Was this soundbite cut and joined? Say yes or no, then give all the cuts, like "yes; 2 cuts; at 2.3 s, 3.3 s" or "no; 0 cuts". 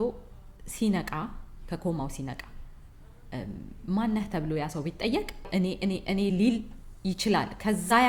no; 0 cuts